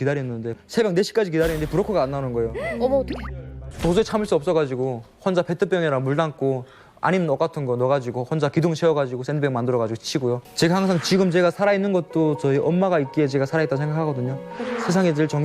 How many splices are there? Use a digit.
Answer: 2